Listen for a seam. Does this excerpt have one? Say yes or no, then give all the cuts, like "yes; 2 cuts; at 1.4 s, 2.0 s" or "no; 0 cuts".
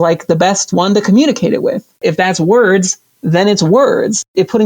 yes; 1 cut; at 2.0 s